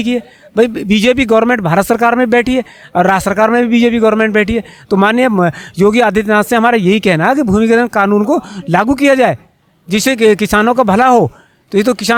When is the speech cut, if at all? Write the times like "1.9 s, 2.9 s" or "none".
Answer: none